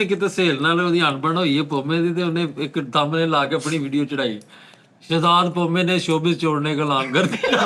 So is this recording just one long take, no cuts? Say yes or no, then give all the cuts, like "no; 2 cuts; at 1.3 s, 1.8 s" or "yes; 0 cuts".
yes; 0 cuts